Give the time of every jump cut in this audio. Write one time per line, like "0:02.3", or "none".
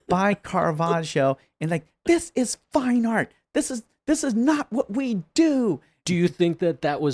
0:06.0